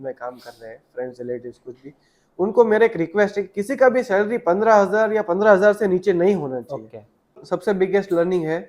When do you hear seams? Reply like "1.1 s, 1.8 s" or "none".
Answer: 7.5 s